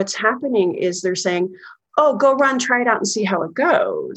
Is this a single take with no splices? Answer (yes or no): yes